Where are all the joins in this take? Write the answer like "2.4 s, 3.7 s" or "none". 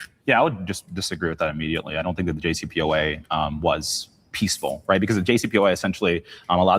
5.8 s